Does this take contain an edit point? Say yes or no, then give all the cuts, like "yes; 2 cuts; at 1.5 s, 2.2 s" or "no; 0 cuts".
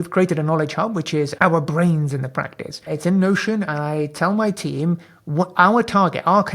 yes; 2 cuts; at 1.3 s, 2.9 s